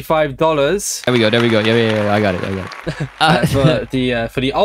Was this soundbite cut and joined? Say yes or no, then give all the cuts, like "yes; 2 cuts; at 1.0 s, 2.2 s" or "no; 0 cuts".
no; 0 cuts